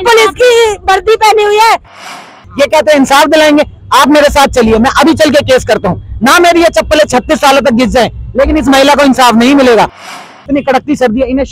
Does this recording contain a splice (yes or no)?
yes